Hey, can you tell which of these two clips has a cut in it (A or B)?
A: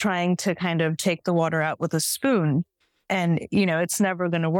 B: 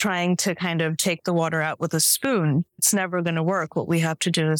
B